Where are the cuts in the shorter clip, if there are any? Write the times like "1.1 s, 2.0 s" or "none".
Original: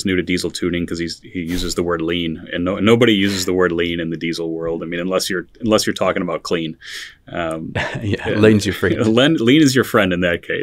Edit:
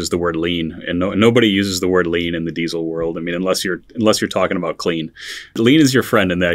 5.6 s

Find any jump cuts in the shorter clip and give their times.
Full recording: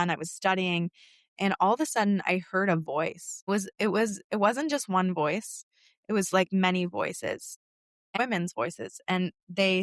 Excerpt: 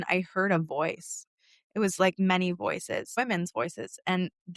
1.2 s, 3.1 s

